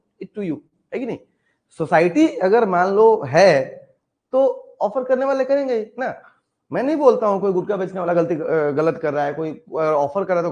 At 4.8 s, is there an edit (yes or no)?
no